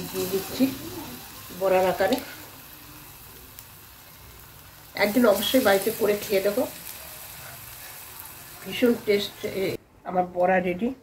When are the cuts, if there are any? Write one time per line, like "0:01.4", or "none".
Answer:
0:09.8